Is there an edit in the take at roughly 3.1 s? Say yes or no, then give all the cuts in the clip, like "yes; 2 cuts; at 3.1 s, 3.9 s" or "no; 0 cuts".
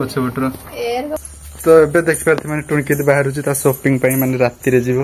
no; 1 cut; at 1.2 s